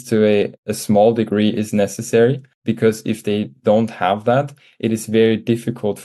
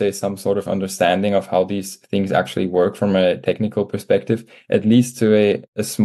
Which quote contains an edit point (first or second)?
first